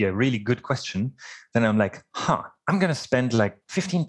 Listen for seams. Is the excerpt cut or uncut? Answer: cut